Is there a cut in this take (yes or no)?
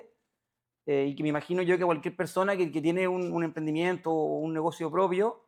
no